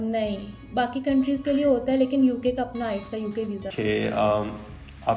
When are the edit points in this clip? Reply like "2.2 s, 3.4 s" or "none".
3.7 s